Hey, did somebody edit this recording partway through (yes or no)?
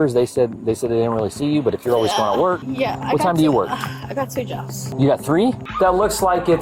yes